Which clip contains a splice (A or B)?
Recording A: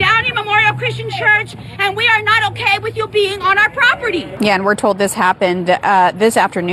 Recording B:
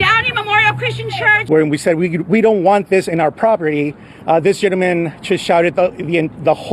B